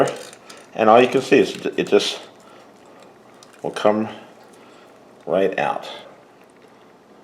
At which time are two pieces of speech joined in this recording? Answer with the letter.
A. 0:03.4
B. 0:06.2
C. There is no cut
B